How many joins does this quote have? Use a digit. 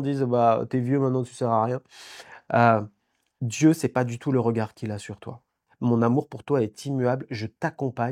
1